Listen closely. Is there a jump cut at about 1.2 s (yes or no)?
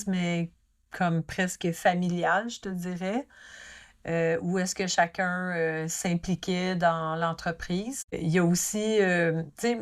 no